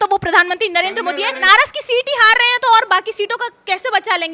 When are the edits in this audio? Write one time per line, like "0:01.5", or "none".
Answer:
0:01.4